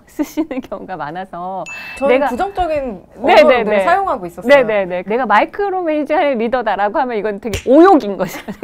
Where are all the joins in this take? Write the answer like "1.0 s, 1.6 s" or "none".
none